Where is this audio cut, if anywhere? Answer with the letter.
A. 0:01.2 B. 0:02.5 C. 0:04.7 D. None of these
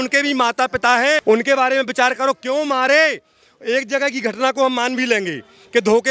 A